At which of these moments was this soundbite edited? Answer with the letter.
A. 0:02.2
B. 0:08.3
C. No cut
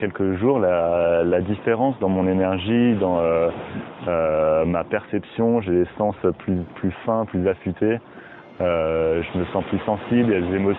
C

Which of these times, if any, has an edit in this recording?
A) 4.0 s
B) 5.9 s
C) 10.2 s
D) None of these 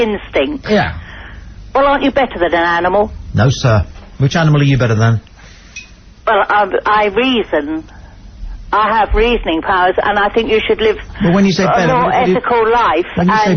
D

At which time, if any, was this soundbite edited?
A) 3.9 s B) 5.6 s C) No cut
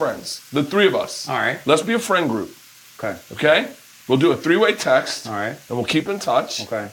C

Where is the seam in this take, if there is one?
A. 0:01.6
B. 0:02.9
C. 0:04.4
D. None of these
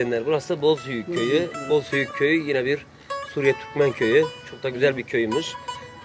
A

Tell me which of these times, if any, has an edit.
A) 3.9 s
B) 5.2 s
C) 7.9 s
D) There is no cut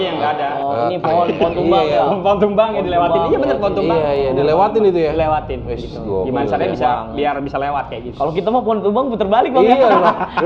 D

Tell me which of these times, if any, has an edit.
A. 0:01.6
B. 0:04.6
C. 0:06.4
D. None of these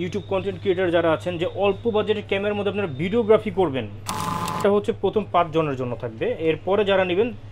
B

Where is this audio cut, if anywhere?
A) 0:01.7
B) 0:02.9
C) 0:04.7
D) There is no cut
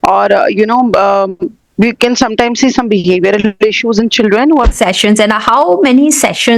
C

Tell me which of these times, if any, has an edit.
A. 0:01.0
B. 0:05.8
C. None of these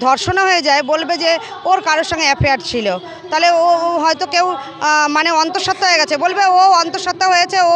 C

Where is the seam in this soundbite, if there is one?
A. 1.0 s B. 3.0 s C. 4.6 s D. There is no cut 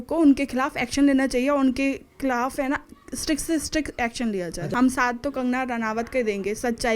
C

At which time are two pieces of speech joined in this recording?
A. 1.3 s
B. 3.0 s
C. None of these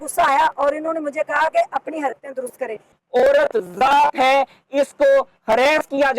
B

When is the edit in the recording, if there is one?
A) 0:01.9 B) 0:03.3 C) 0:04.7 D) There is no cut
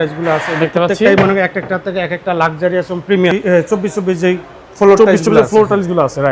B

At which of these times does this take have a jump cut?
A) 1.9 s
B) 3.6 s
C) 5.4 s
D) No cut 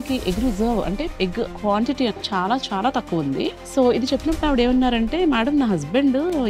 B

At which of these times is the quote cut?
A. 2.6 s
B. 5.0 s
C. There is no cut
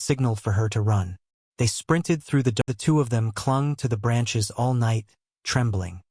A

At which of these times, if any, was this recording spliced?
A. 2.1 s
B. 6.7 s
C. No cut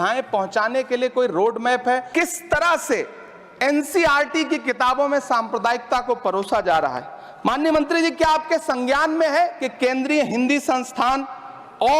A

